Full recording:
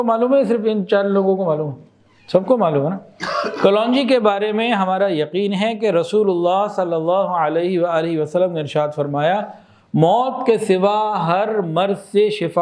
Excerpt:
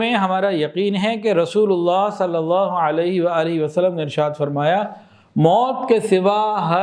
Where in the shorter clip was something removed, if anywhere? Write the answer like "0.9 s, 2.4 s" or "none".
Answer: none